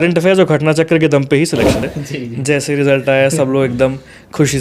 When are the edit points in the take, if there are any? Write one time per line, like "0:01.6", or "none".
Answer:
0:01.8